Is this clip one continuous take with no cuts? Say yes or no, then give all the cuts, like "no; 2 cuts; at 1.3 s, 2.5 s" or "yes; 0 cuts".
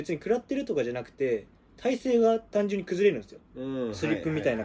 yes; 0 cuts